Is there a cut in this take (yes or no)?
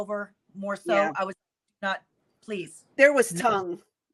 no